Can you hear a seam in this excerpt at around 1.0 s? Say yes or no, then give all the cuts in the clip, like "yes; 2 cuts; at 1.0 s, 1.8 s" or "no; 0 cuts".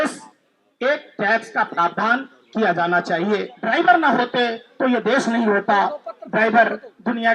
no; 1 cut; at 3.5 s